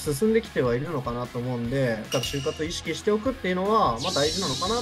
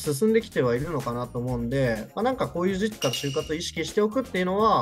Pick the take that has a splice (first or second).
first